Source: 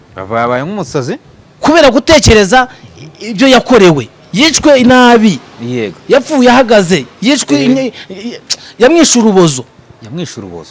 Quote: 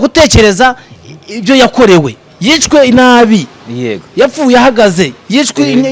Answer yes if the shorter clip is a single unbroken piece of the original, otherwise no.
yes